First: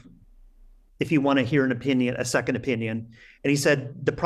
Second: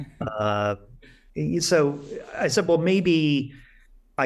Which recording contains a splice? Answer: second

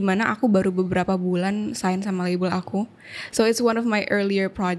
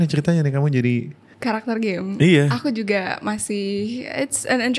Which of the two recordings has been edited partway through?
second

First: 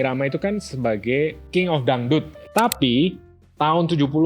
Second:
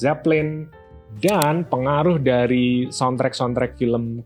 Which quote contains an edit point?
first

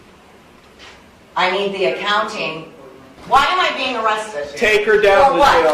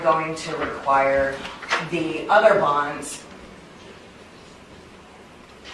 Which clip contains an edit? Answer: first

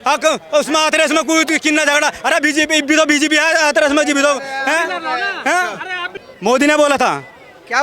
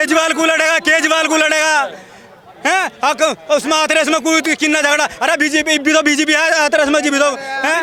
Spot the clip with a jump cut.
first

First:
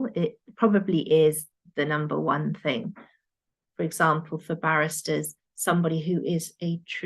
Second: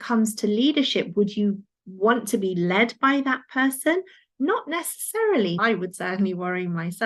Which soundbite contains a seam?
first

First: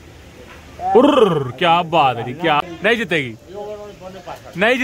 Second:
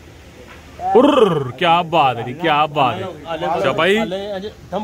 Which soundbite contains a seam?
first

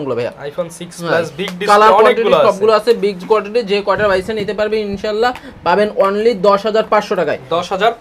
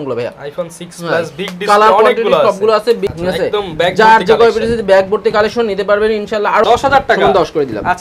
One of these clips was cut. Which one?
second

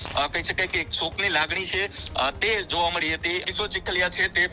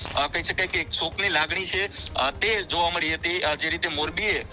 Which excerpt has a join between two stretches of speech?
first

